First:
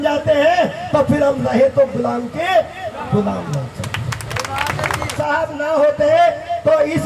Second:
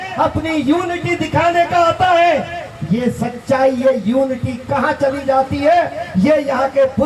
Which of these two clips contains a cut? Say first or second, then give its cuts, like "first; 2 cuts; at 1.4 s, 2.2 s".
first; 1 cut; at 5.1 s